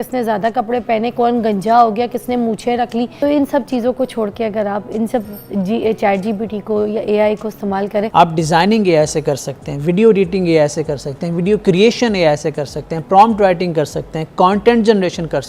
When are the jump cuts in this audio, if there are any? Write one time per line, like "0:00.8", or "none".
0:03.1
0:08.1